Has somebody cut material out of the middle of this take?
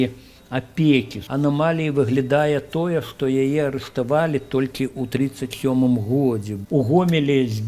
yes; 2 cuts; at 1.2 s, 6.5 s

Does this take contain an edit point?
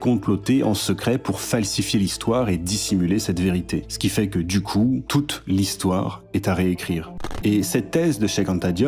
no; 0 cuts

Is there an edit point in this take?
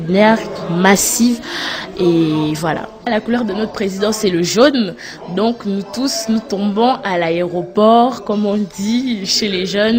no; 0 cuts

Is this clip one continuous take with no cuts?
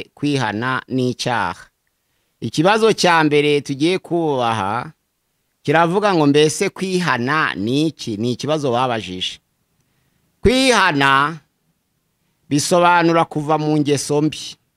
yes; 0 cuts

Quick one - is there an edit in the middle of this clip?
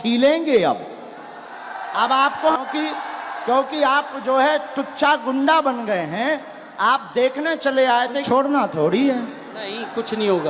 yes; 2 cuts; at 2.6 s, 8.2 s

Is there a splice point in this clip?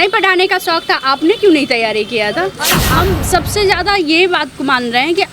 yes; 1 cut; at 2.8 s

